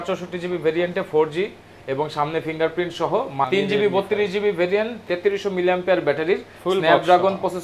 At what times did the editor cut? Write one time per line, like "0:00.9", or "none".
0:03.5